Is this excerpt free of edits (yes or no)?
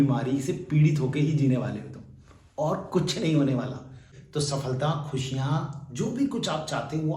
no